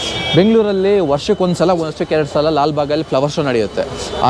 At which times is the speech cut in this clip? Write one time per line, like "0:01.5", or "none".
none